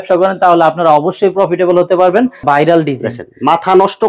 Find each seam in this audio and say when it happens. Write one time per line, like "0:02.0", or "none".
0:02.4